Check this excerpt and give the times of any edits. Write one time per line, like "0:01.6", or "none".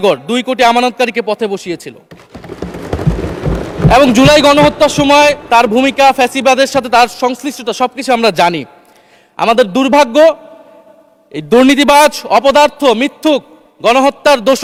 none